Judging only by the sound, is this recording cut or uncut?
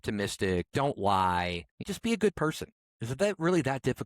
cut